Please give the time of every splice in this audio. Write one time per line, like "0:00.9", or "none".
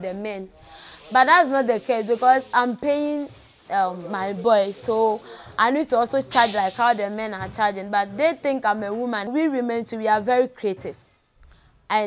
0:09.3